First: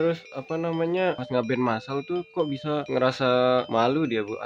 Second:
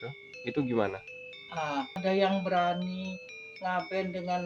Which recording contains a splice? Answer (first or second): second